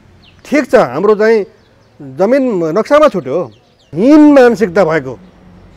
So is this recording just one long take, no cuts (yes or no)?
no